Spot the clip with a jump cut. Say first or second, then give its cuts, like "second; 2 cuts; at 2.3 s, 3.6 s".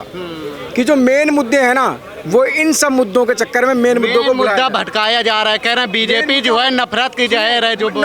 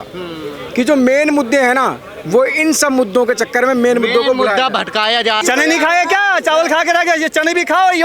second; 1 cut; at 5.4 s